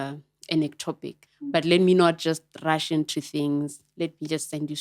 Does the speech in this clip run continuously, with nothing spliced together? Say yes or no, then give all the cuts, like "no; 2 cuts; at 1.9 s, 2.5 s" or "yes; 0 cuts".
no; 1 cut; at 1.5 s